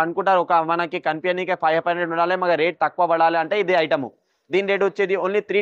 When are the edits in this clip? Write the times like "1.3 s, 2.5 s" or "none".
none